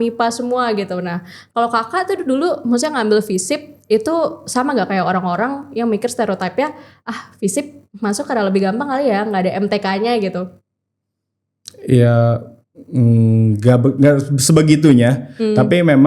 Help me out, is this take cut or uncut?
uncut